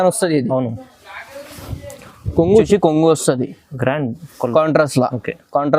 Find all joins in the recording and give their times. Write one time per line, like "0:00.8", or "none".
0:02.5

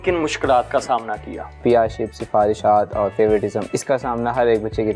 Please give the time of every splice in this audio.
0:01.6
0:03.6

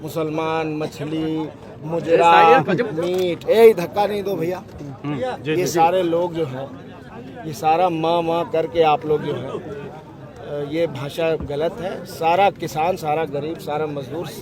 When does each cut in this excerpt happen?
none

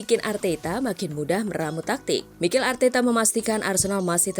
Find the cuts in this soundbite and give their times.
0:02.3

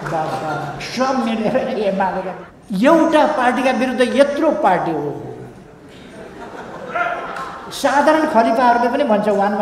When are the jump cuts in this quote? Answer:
0:02.3

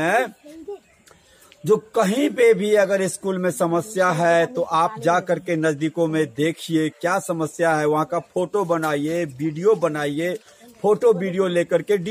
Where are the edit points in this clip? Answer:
none

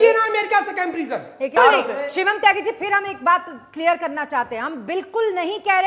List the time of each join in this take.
0:01.5

